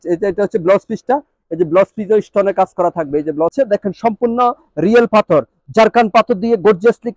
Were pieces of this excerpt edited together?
yes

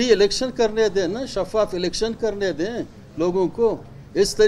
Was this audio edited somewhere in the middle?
no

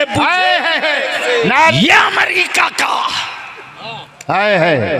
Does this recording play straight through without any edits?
no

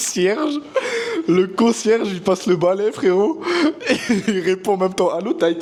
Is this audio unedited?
yes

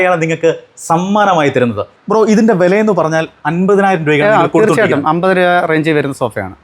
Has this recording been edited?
yes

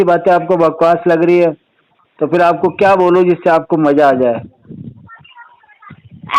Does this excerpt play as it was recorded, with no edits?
yes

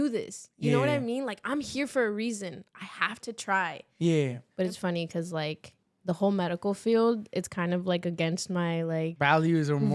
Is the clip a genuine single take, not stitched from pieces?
no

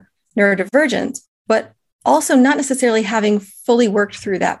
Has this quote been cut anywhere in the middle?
no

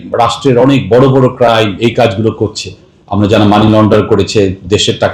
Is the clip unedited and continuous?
yes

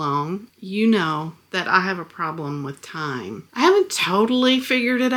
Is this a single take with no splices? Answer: yes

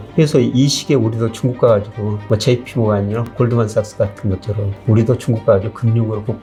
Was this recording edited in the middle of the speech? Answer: no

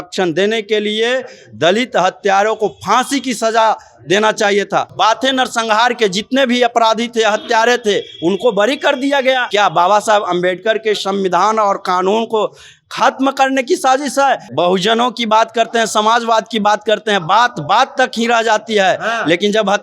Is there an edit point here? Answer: yes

